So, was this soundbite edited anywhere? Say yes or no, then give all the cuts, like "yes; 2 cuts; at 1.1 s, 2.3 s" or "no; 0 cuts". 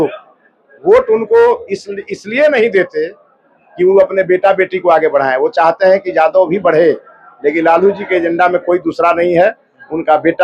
no; 0 cuts